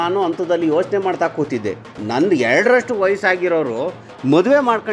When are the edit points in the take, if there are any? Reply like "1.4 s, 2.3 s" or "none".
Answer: 1.9 s

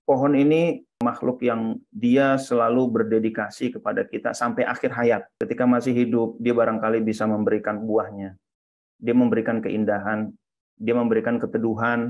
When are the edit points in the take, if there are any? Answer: 1.0 s, 5.3 s

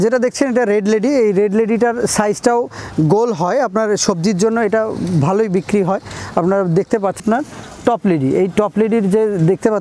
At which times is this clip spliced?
7.2 s

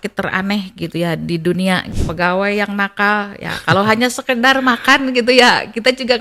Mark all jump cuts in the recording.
1.9 s

